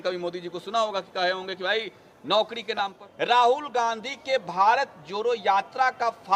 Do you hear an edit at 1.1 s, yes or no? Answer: no